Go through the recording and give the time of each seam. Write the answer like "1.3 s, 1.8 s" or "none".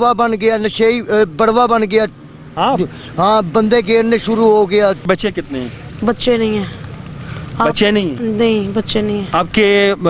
5.1 s

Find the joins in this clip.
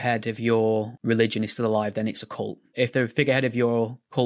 0.9 s, 2.7 s

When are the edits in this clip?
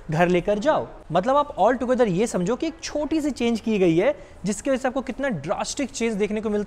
1.0 s

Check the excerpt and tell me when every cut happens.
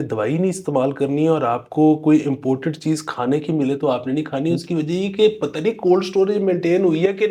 none

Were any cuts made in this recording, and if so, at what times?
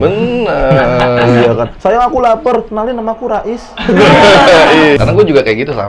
5.0 s

